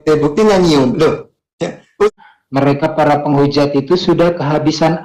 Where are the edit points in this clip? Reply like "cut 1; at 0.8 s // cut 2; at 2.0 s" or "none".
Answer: cut 1; at 2.1 s